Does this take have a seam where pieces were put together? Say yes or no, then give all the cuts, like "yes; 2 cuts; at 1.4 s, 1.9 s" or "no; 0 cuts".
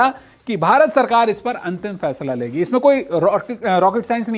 no; 0 cuts